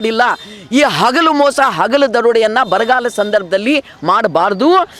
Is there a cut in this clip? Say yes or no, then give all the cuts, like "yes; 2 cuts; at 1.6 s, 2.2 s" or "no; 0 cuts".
no; 0 cuts